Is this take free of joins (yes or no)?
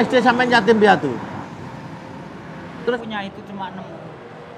no